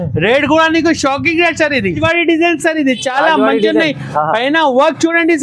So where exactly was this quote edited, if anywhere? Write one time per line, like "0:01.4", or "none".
0:02.0